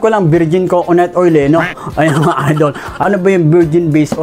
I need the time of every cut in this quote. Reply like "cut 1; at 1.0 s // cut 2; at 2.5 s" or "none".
cut 1; at 3.0 s